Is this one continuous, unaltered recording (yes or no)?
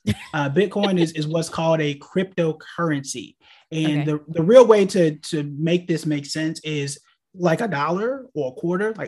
yes